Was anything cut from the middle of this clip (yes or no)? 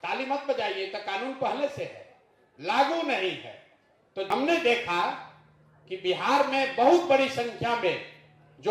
yes